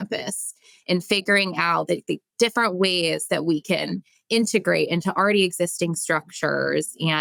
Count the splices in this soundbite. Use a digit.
0